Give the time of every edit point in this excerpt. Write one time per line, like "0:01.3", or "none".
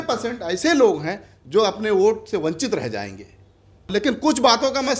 0:03.9